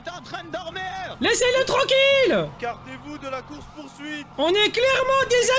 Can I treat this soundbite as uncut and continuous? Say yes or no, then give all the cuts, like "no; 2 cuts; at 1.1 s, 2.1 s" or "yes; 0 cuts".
no; 3 cuts; at 1.1 s, 2.5 s, 4.3 s